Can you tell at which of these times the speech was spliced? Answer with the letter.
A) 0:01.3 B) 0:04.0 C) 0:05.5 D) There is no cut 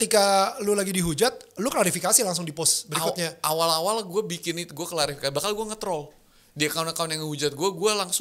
D